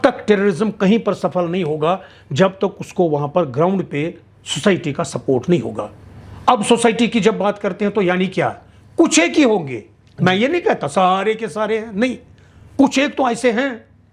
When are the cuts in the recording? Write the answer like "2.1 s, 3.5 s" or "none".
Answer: none

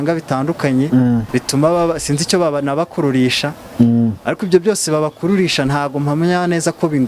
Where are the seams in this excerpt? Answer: 1.3 s

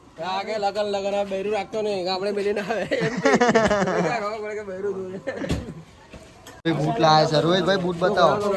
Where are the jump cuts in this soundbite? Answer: 6.6 s

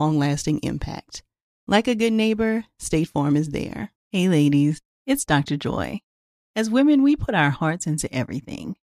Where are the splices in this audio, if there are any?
3.9 s

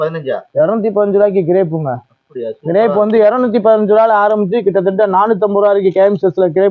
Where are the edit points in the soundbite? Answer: none

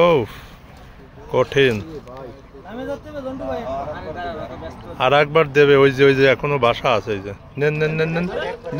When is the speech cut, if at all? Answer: none

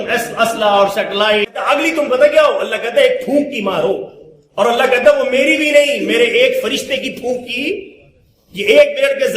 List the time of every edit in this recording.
1.5 s

